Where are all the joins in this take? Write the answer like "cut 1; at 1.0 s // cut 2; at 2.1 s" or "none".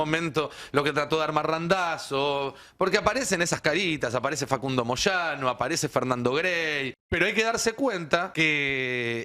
cut 1; at 7.0 s // cut 2; at 8.3 s